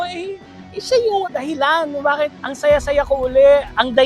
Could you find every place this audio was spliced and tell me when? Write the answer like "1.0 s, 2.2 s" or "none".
1.2 s, 2.4 s